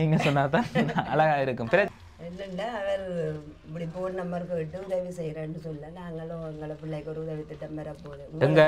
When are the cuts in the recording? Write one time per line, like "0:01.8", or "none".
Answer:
0:01.9